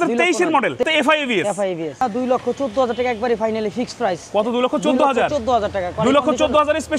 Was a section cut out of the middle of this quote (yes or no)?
yes